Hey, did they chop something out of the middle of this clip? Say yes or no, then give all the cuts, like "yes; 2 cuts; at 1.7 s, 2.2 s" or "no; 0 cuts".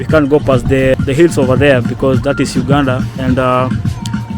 yes; 1 cut; at 0.9 s